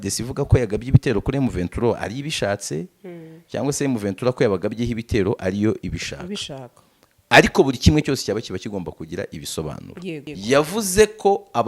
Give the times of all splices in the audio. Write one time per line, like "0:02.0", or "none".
0:10.3